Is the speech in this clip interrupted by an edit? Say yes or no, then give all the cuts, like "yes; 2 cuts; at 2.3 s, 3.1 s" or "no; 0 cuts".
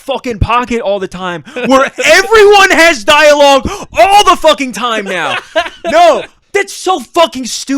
yes; 1 cut; at 6.3 s